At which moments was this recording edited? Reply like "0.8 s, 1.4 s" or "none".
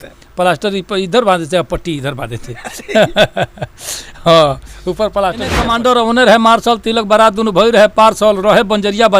5.7 s

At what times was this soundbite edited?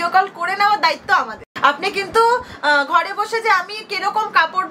none

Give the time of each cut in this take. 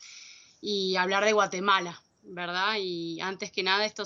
2.1 s

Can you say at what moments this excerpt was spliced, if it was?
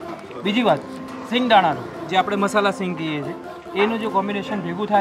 1.1 s

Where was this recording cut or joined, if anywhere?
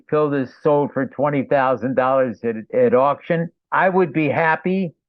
2.6 s

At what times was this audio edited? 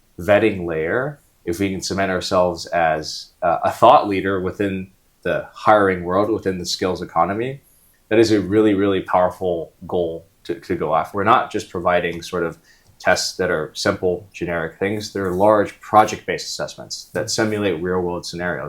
11.1 s

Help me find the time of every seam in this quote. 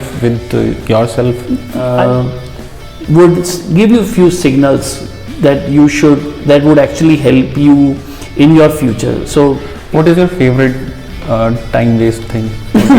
1.7 s, 9.7 s

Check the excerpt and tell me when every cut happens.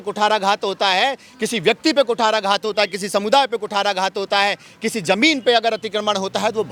none

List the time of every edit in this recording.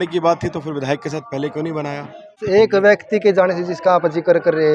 2.2 s

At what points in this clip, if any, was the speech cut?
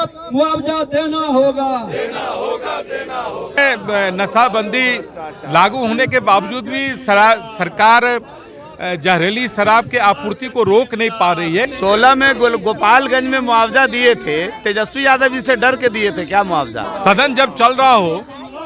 3.6 s, 11.7 s, 16.9 s

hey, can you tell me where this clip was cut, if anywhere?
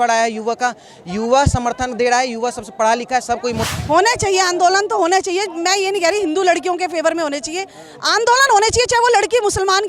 3.6 s

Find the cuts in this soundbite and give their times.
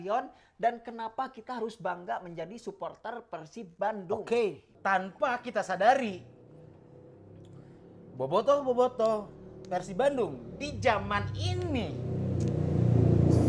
4.7 s

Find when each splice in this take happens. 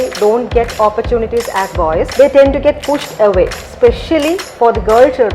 2.1 s, 3.6 s

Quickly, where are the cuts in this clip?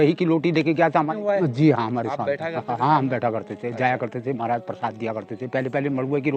1.1 s

